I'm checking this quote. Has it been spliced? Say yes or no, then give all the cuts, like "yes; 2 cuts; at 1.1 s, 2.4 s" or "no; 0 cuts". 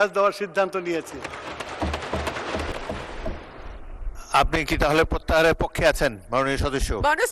yes; 1 cut; at 2.7 s